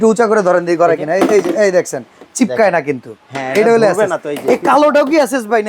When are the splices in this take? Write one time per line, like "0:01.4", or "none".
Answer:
none